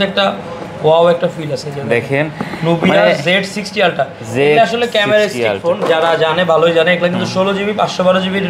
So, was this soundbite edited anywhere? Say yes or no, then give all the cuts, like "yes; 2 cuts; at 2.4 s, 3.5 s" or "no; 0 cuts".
no; 0 cuts